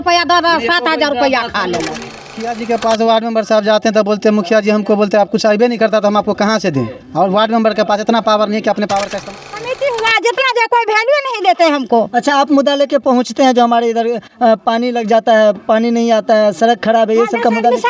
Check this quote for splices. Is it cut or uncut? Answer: cut